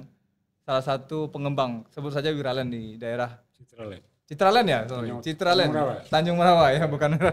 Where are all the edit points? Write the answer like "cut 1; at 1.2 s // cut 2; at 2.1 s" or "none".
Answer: none